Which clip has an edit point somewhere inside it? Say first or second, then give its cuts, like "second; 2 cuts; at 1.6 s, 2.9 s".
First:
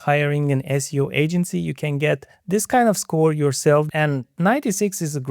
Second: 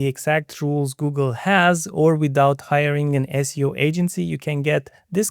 first; 1 cut; at 3.9 s